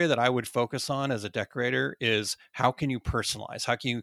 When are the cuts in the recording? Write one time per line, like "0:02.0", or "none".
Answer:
none